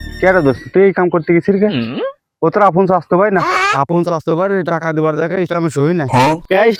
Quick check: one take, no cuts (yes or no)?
yes